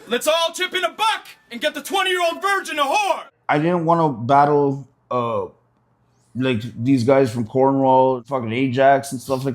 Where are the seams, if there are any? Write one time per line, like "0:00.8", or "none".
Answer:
0:03.3
0:08.3